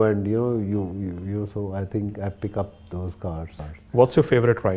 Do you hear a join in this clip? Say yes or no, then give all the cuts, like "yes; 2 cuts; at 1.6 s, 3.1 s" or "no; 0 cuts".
yes; 1 cut; at 3.5 s